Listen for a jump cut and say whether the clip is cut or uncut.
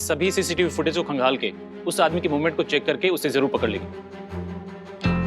uncut